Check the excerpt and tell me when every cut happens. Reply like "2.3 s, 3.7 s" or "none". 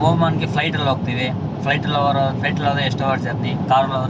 none